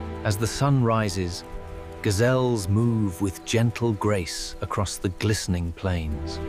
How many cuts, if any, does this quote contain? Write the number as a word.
zero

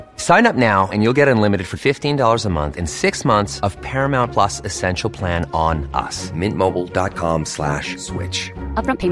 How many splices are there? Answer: zero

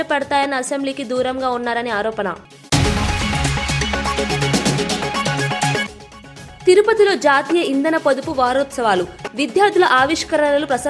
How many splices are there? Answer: one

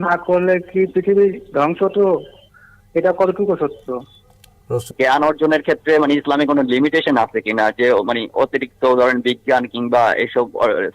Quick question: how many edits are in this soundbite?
one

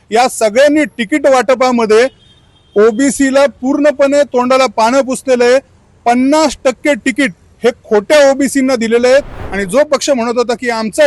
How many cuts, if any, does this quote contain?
one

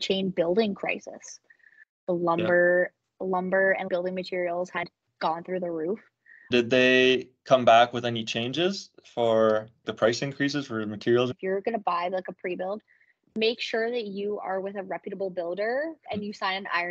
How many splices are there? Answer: four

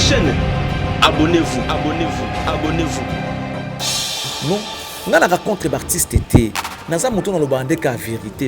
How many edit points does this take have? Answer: one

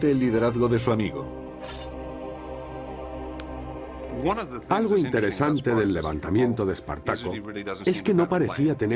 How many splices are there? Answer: one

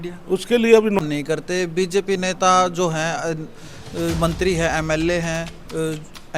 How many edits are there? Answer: one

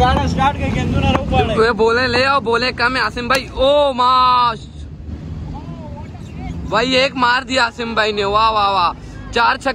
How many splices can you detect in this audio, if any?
zero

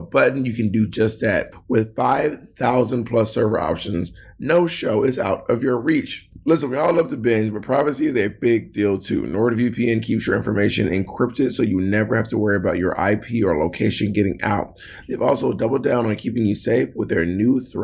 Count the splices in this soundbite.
one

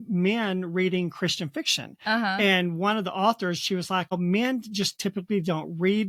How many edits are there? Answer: zero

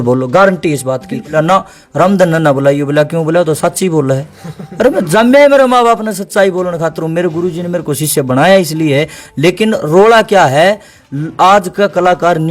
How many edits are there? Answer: two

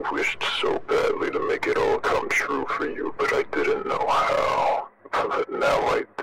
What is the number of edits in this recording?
one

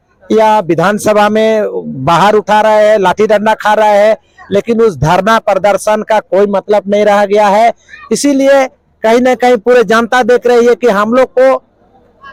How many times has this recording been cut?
zero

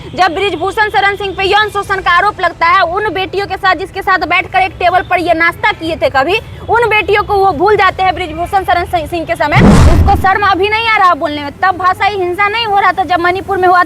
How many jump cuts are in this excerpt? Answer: one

